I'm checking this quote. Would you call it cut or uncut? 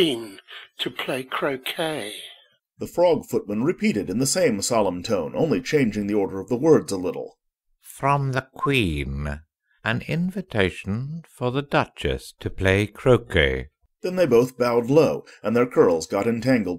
uncut